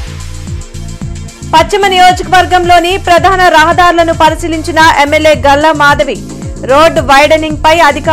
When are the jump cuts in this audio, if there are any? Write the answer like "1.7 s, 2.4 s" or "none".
0.9 s